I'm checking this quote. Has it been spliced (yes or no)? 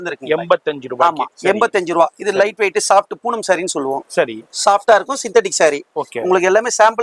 no